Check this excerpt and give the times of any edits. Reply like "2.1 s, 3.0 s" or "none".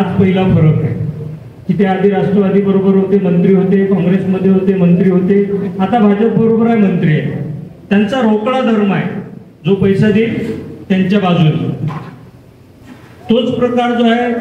none